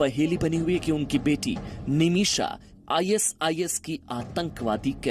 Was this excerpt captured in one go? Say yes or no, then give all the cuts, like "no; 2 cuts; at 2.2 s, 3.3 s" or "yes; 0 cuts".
yes; 0 cuts